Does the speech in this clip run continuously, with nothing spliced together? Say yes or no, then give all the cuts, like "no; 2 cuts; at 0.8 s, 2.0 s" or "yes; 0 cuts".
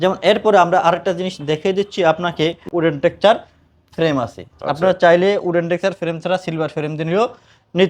no; 1 cut; at 2.7 s